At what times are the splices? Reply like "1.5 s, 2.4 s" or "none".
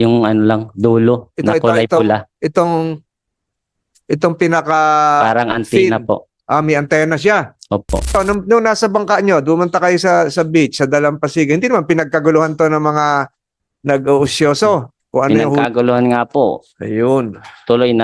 8.2 s, 15.5 s